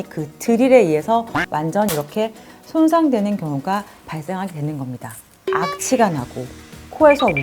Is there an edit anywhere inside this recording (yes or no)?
yes